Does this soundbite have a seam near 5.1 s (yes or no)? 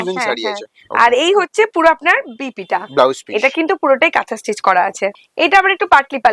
yes